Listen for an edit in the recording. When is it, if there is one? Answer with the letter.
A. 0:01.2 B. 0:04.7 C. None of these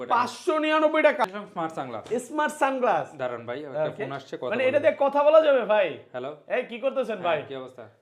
A